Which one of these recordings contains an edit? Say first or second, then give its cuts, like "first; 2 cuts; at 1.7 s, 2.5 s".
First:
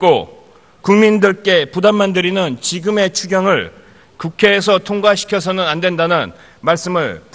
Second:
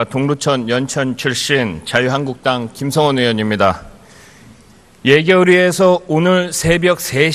first; 1 cut; at 4.6 s